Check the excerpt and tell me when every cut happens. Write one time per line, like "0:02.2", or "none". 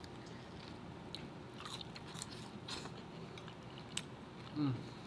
none